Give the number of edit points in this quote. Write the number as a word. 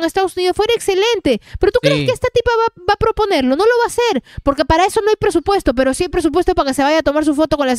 zero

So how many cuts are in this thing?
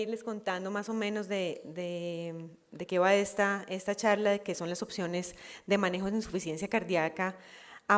one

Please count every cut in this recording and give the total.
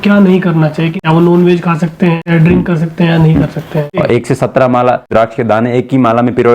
four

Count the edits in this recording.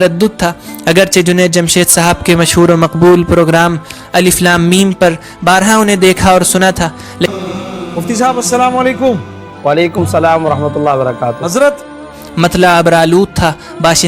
one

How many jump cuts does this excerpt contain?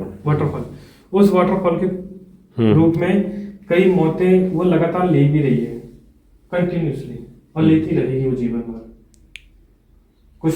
zero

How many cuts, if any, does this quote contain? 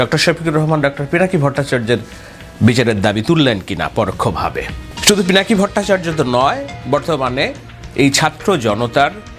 one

